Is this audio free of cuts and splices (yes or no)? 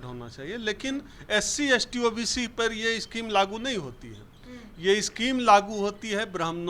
yes